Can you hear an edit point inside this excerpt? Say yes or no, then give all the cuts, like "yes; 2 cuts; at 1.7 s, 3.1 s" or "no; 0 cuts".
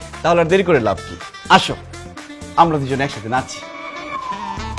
no; 0 cuts